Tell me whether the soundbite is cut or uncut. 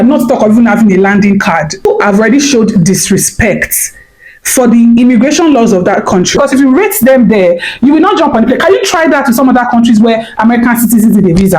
cut